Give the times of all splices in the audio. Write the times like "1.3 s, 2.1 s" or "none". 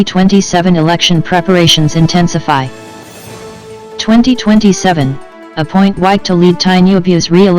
2.8 s, 4.1 s